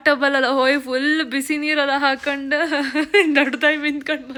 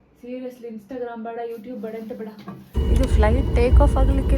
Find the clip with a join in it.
second; 1 cut; at 2.8 s

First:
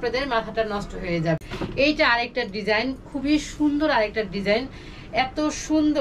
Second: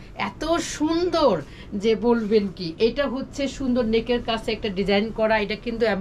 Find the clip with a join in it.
first; 1 cut; at 1.4 s

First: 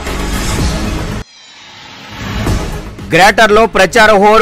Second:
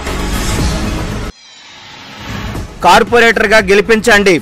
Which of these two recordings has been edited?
second; 2 cuts; at 0.9 s, 2.3 s

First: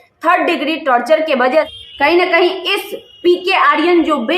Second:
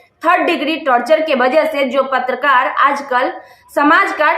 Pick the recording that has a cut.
first; 1 cut; at 1.7 s

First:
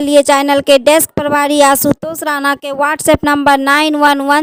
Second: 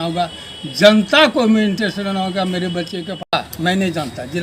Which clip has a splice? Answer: second; 1 cut; at 3.1 s

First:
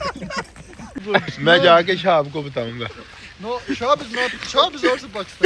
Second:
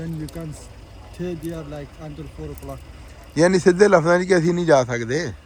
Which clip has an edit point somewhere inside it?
first; 1 cut; at 1.0 s

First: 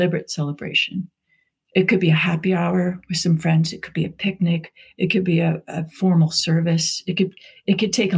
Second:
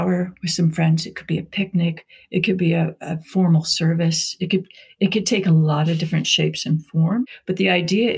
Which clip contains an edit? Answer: second; 1 cut; at 7.2 s

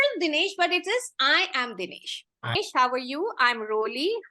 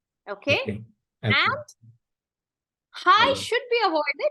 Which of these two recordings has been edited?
first; 1 cut; at 2.6 s

